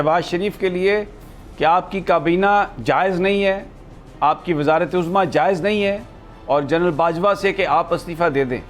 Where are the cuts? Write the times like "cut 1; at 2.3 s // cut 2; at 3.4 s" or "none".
none